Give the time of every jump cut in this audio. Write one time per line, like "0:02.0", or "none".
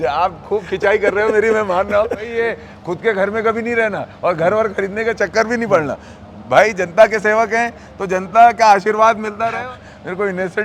0:02.3
0:09.5